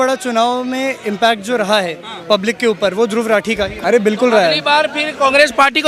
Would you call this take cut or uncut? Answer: cut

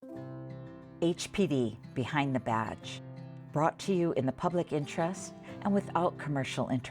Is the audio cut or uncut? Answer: cut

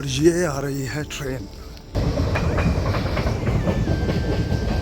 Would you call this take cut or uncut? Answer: cut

